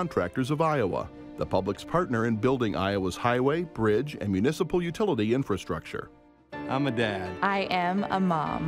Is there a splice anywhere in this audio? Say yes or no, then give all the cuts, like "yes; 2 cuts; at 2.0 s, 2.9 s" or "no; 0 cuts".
no; 0 cuts